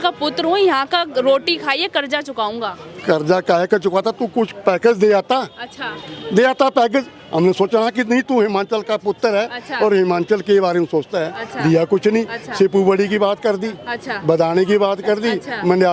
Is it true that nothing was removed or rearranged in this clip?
yes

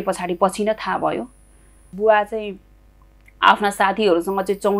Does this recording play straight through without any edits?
no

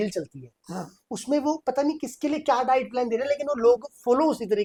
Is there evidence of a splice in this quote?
no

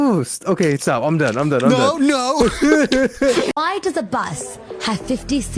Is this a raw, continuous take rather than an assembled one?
no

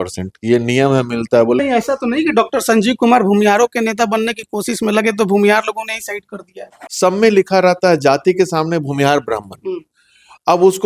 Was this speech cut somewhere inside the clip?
yes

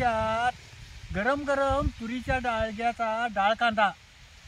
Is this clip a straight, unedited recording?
yes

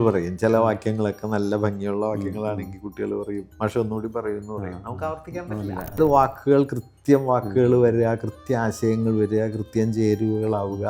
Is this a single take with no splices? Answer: no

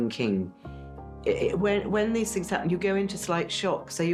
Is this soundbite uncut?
yes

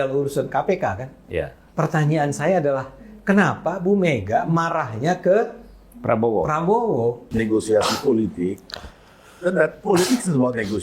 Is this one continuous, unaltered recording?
no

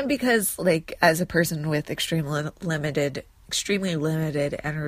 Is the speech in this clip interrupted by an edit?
no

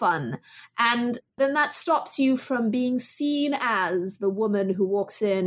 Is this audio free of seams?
yes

